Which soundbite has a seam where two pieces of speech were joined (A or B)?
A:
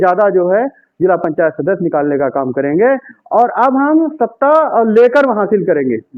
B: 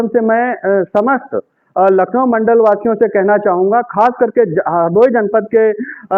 A